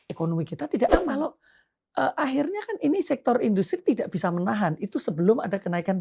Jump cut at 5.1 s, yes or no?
no